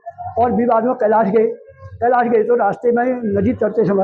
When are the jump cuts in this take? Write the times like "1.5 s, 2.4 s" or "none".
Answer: none

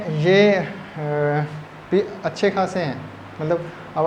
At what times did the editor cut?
none

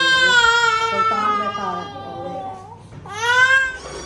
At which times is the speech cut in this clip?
none

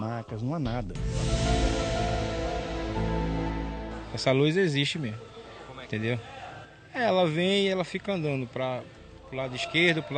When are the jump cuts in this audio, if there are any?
1.0 s

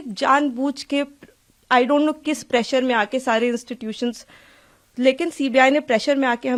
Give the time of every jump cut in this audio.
none

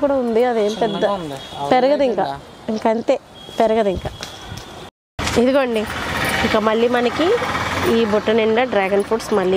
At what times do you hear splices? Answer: 5.1 s

